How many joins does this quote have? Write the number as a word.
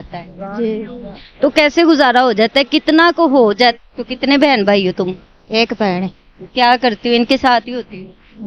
one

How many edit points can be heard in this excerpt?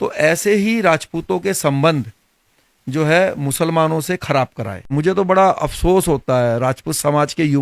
one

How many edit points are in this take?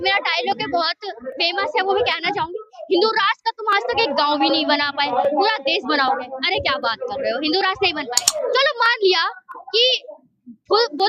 one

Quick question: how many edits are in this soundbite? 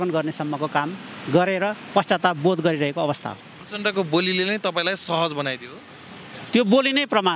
one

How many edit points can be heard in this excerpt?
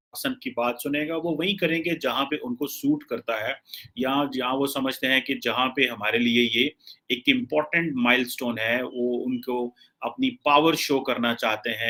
zero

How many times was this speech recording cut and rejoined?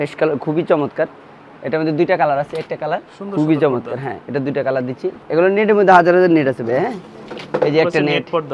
two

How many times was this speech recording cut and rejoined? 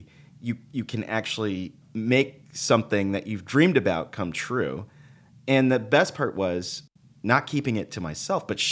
three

